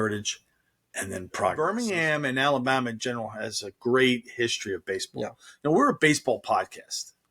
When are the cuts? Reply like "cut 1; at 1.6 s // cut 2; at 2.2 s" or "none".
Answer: cut 1; at 1.6 s